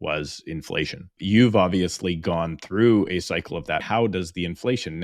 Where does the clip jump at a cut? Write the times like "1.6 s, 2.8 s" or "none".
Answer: 1.2 s, 3.8 s